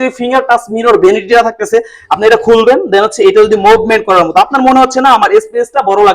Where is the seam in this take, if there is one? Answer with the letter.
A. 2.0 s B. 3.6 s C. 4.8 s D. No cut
A